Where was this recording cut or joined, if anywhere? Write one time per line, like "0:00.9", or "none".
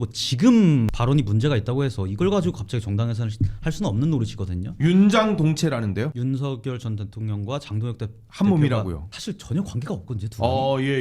0:00.9
0:06.2
0:09.1